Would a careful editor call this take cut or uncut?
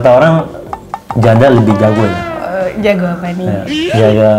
uncut